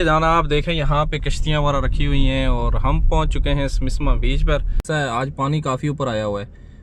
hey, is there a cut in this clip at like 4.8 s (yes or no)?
yes